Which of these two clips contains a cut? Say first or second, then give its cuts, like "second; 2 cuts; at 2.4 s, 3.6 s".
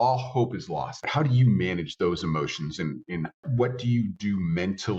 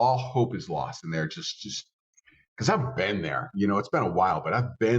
first; 2 cuts; at 1.1 s, 3.4 s